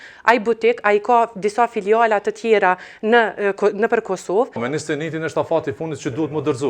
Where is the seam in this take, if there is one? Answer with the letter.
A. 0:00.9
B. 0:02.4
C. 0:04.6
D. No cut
C